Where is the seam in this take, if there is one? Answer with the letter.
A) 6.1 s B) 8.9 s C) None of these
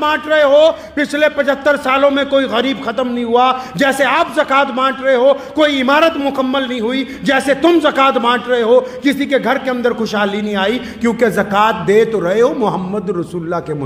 C